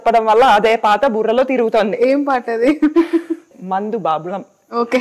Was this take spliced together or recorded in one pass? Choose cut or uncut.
cut